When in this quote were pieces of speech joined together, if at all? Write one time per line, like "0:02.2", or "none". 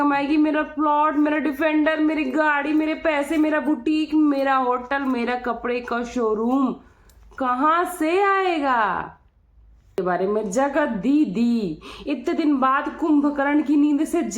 0:10.0

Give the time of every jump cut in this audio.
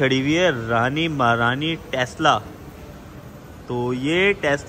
none

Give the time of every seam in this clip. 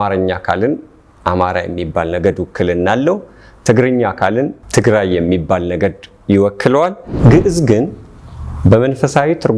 0:07.1

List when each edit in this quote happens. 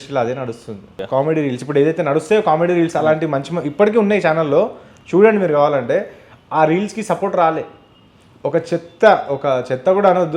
0:01.0

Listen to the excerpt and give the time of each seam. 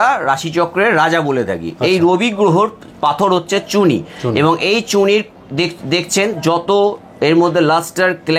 none

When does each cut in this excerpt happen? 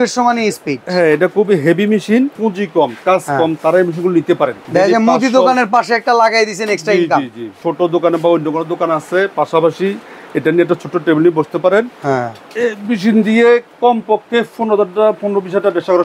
0:02.4
0:04.6
0:07.6

